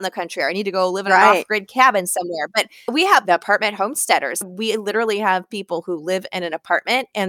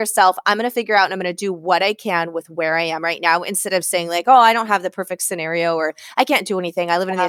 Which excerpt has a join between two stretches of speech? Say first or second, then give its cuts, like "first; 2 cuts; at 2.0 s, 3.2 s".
first; 2 cuts; at 2.9 s, 4.4 s